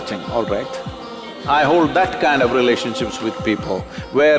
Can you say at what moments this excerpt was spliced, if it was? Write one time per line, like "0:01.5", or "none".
0:01.3